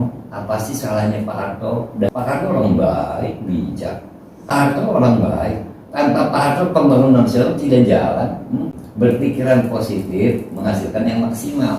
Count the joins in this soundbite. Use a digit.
3